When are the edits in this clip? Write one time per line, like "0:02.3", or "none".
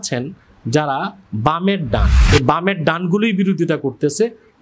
0:02.1